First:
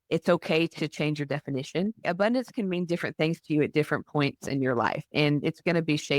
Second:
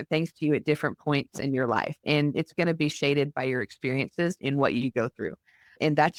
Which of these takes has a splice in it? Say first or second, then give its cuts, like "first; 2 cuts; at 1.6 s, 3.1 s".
first; 1 cut; at 2.0 s